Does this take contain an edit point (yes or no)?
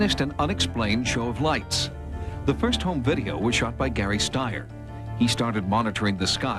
yes